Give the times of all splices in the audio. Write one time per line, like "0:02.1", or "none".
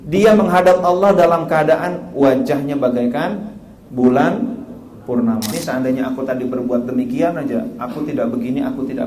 0:05.5